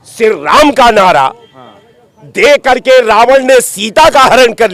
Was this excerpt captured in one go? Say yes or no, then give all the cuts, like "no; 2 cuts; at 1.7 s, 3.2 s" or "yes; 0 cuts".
yes; 0 cuts